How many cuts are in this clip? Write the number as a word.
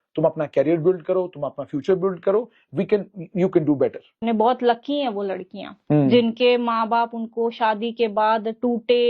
one